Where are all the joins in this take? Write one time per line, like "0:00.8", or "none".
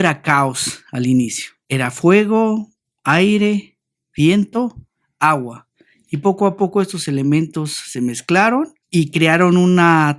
none